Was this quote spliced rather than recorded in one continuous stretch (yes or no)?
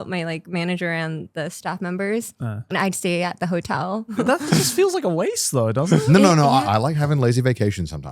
yes